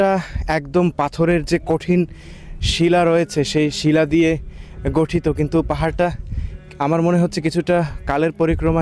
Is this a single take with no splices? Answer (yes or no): yes